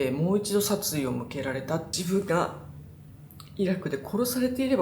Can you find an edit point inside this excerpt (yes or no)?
yes